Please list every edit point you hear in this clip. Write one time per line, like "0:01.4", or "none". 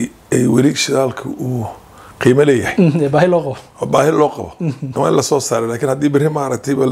none